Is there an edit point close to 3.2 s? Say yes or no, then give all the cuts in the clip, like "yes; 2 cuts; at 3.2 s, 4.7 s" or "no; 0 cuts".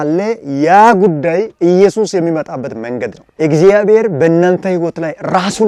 no; 0 cuts